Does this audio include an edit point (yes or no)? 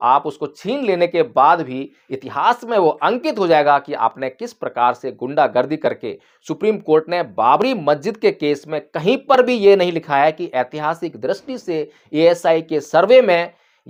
no